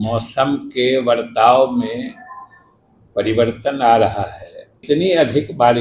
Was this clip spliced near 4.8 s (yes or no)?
yes